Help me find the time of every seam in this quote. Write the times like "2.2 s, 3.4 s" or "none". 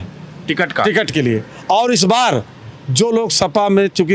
none